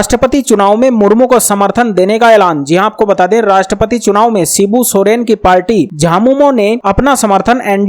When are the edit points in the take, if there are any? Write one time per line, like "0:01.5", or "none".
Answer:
none